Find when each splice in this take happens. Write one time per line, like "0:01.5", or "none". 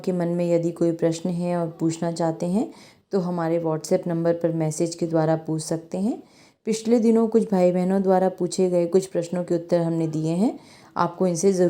none